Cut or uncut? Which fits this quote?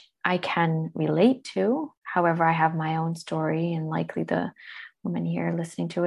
cut